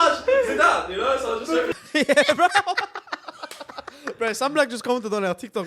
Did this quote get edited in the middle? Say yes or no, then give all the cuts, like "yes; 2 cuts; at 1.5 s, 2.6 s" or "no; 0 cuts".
yes; 1 cut; at 1.7 s